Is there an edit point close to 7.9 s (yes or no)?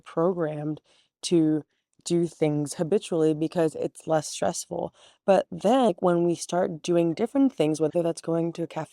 yes